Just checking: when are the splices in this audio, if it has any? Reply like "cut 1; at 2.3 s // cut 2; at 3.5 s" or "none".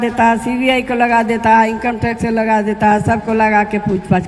none